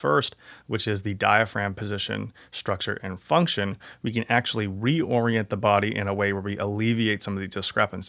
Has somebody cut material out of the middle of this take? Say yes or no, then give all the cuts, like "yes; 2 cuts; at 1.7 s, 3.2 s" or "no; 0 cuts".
no; 0 cuts